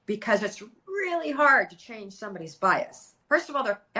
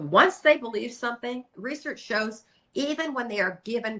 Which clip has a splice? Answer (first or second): second